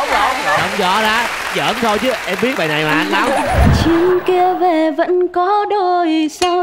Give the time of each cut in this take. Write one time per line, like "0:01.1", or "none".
0:03.7